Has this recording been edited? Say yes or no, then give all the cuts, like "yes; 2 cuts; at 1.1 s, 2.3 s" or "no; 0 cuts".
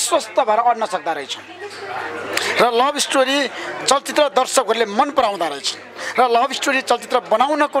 no; 0 cuts